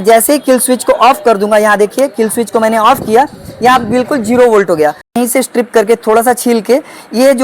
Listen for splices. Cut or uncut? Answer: cut